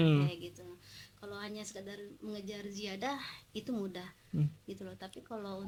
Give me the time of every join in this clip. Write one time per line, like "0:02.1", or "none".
none